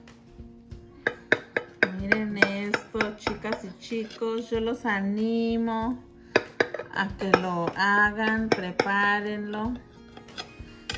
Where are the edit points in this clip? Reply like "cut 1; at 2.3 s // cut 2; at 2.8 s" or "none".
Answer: none